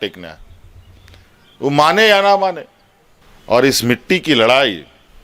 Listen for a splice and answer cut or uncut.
uncut